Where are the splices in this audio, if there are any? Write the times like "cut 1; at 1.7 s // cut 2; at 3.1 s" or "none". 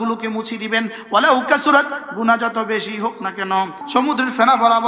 cut 1; at 3.8 s